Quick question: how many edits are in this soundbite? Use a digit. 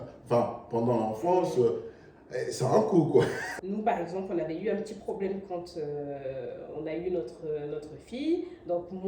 1